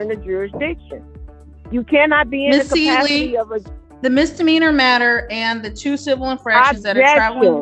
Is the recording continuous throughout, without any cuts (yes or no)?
yes